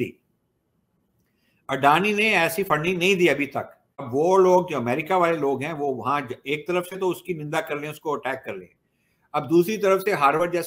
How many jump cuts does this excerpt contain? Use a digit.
1